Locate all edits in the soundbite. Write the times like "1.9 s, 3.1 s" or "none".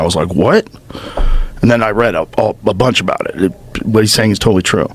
none